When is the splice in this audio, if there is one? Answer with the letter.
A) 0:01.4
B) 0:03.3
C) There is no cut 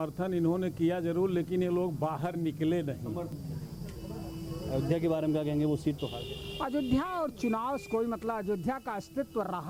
B